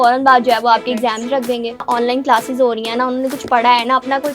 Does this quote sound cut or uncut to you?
cut